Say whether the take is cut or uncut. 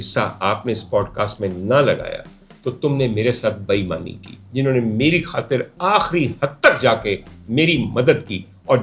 cut